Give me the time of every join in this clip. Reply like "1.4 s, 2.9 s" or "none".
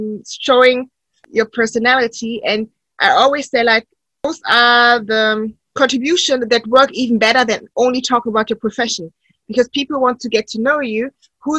1.2 s, 4.3 s